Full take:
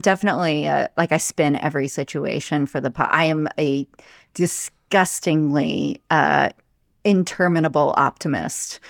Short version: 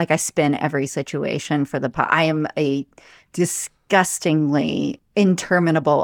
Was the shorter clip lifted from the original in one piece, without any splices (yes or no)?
no